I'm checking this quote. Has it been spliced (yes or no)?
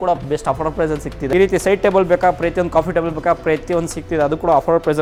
no